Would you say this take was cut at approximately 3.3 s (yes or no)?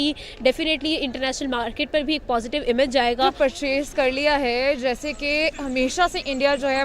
yes